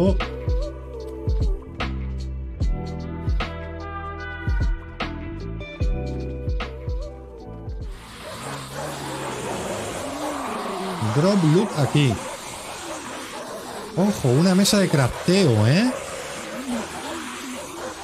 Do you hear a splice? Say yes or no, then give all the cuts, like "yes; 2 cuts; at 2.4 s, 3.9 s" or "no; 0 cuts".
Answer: yes; 1 cut; at 8.1 s